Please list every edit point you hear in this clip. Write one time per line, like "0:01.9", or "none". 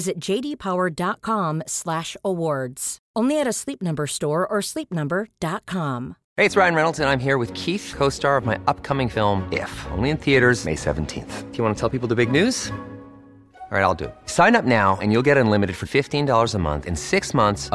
0:06.2